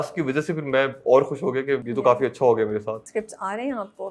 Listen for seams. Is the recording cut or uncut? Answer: cut